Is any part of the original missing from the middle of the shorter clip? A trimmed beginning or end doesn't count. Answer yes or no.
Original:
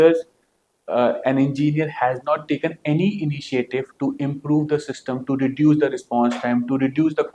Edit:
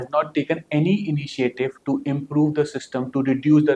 no